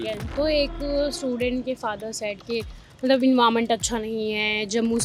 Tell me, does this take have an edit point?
no; 0 cuts

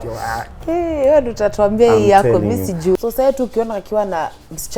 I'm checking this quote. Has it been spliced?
yes; 1 cut; at 3.0 s

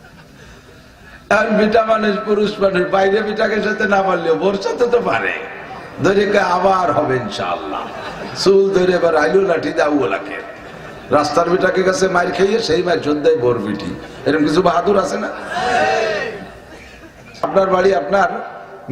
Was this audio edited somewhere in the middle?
yes; 1 cut; at 17.5 s

